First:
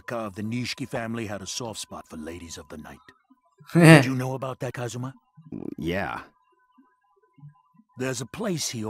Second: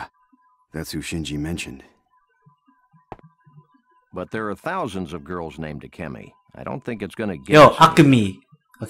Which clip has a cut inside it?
first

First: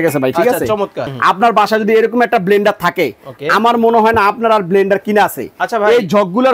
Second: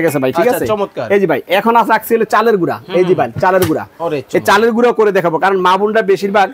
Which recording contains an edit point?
first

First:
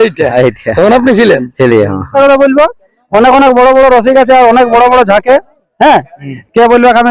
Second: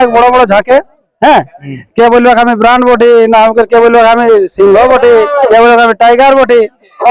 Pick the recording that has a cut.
first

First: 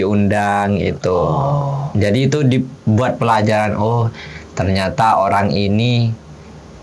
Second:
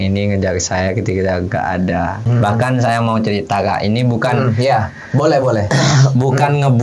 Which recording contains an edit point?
second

